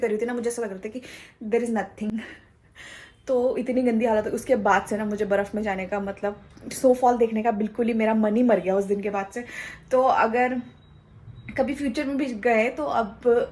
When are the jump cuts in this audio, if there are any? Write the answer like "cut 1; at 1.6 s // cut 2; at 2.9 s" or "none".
none